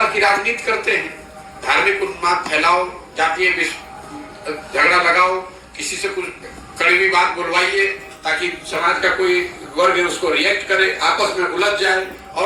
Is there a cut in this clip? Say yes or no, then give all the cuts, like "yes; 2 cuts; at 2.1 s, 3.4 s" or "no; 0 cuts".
no; 0 cuts